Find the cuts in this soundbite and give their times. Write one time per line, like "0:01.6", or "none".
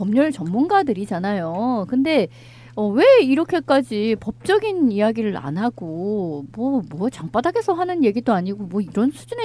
0:07.5